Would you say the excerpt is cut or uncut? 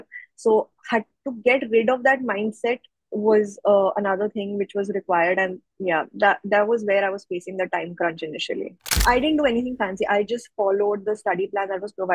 cut